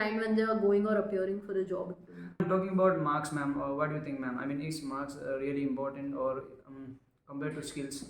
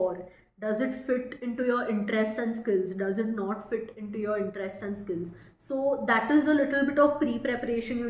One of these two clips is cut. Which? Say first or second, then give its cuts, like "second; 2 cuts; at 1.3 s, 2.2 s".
first; 1 cut; at 2.4 s